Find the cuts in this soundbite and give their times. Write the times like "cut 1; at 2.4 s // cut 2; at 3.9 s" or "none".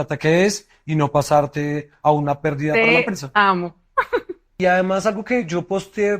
cut 1; at 4.4 s